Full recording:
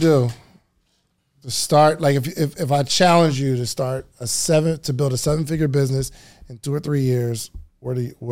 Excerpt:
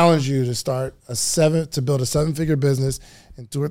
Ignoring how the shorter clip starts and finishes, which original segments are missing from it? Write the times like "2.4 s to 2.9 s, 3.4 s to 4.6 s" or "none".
none